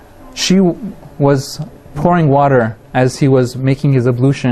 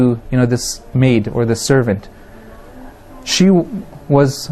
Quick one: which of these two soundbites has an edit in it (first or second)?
second